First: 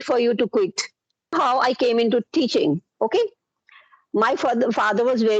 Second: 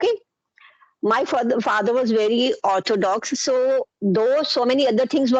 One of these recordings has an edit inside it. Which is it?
first; 1 cut; at 1.3 s

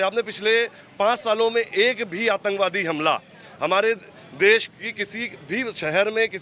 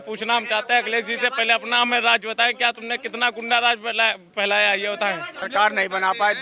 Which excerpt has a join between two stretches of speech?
second; 1 cut; at 5.4 s

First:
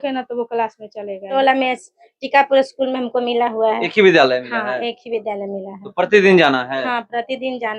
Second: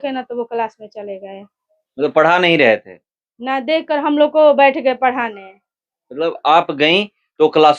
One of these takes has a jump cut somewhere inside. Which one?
first; 1 cut; at 1.3 s

